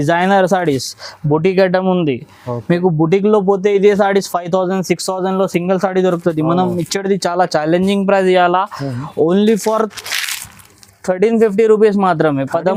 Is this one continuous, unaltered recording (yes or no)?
yes